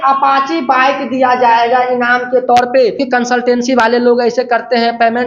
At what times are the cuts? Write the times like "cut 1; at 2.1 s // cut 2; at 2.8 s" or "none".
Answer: cut 1; at 3.0 s